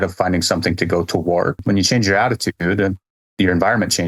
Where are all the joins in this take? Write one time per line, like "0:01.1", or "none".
0:01.6